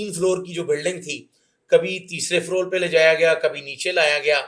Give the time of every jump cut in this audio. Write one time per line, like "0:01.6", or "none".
none